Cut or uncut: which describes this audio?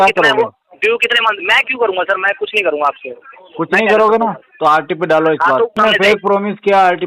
cut